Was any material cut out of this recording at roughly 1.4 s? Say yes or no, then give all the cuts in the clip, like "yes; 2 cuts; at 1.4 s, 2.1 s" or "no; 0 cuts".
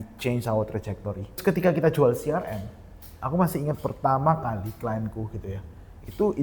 yes; 1 cut; at 1.4 s